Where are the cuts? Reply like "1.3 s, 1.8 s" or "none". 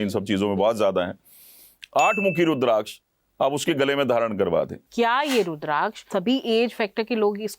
4.8 s, 6.0 s